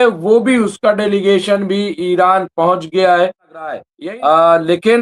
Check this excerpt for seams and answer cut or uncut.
cut